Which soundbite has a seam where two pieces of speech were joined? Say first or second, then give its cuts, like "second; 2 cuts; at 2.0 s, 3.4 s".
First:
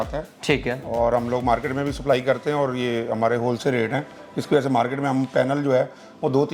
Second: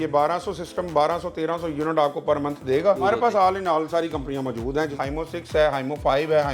second; 2 cuts; at 3.0 s, 4.9 s